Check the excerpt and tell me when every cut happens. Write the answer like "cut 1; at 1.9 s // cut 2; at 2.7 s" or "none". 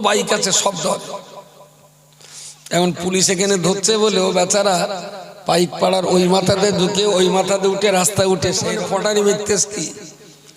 cut 1; at 8.7 s

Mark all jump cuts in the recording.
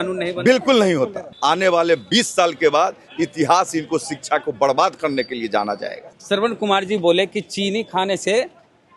cut 1; at 1.2 s // cut 2; at 6.1 s

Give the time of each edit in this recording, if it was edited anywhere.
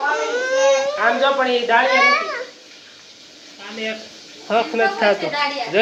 none

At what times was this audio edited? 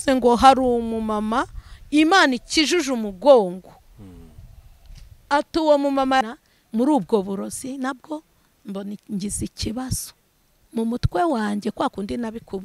cut 1; at 6.2 s

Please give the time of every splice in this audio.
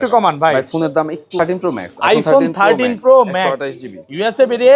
cut 1; at 1.3 s

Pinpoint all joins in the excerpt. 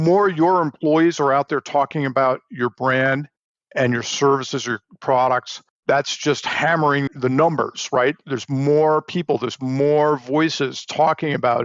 cut 1; at 5.8 s // cut 2; at 7.1 s

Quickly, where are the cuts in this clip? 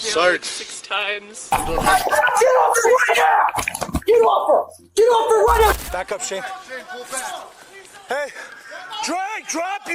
cut 1; at 1.5 s // cut 2; at 5.7 s

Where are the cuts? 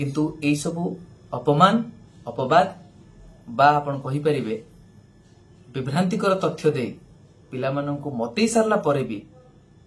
none

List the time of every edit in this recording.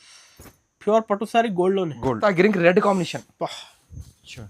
cut 1; at 2.2 s

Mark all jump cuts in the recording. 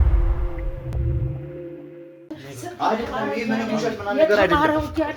cut 1; at 2.2 s

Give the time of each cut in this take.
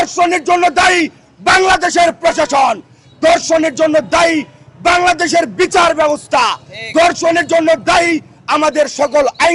none

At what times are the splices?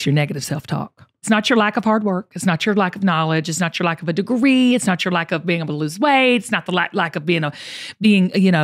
cut 1; at 1.3 s

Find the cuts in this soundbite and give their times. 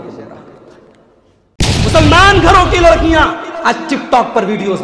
cut 1; at 1.7 s

